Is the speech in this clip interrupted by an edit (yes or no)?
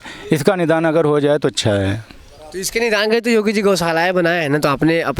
no